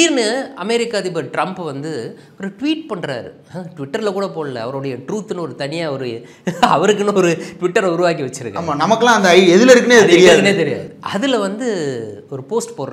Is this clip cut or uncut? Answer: uncut